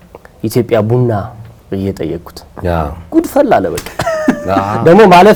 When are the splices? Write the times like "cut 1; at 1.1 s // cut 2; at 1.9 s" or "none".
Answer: none